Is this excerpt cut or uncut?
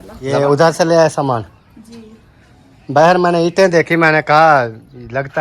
uncut